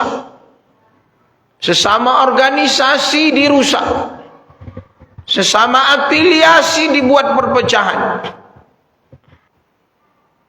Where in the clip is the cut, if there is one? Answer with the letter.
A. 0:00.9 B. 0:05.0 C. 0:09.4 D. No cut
C